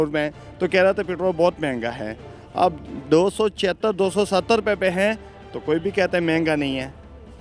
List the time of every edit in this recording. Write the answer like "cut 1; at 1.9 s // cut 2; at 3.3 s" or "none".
none